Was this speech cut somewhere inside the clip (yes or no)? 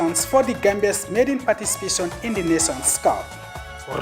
no